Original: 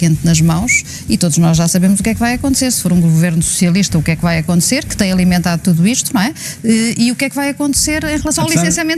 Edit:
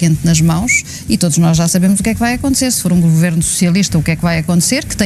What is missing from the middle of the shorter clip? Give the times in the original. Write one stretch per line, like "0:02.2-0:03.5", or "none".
none